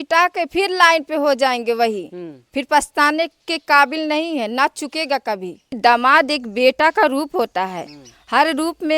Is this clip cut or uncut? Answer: cut